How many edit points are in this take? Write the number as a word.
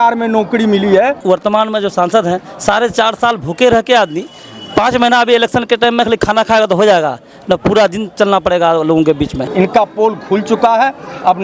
two